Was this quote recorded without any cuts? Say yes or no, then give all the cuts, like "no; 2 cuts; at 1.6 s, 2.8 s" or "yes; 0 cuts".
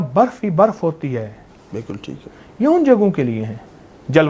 yes; 0 cuts